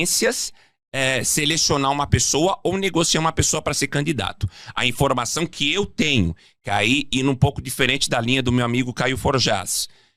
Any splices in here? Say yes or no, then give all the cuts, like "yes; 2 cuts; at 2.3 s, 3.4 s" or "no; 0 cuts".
no; 0 cuts